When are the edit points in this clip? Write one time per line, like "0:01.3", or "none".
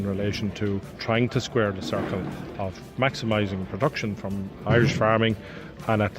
0:00.9